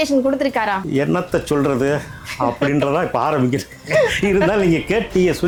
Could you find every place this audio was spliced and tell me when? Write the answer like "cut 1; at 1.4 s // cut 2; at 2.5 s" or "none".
none